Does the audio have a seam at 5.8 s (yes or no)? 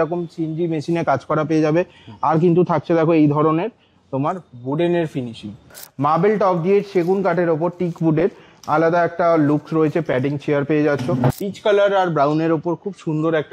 yes